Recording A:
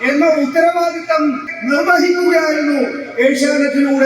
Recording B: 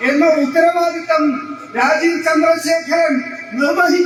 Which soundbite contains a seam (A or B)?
A